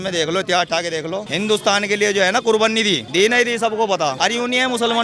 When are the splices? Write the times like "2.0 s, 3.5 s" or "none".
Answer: 1.3 s, 3.1 s, 4.2 s